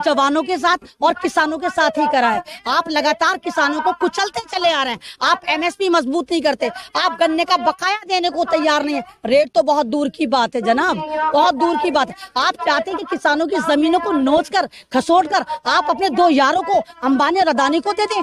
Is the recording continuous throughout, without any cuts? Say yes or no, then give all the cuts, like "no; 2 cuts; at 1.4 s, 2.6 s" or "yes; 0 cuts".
yes; 0 cuts